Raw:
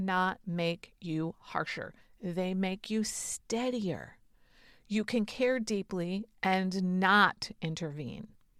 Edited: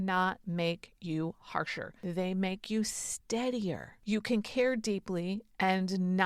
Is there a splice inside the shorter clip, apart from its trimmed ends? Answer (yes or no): yes